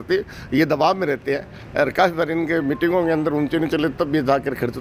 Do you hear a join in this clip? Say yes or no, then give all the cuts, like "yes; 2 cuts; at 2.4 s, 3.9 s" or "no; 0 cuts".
no; 0 cuts